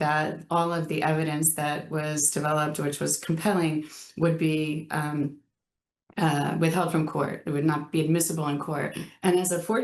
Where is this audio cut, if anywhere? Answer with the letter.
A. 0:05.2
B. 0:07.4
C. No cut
C